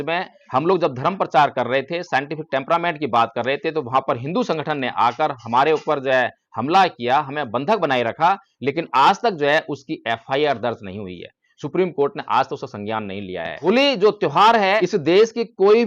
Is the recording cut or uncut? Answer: cut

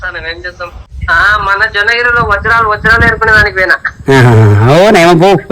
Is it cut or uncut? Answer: cut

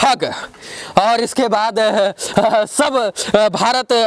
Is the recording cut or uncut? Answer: uncut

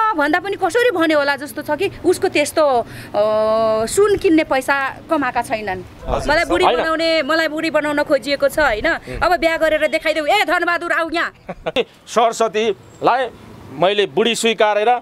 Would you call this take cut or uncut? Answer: cut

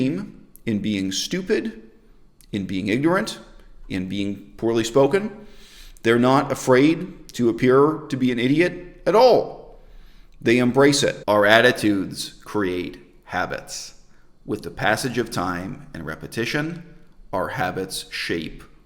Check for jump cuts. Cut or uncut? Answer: cut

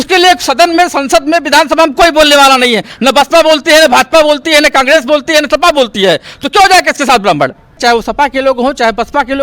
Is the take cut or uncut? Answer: cut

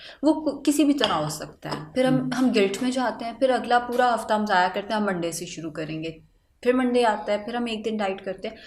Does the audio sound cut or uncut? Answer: uncut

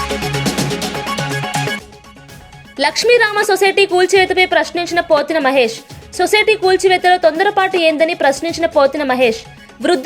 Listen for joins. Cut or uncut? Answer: cut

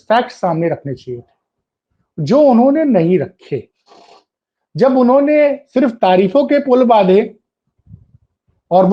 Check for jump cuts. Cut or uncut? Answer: uncut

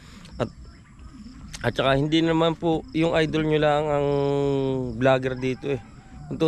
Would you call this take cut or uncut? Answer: uncut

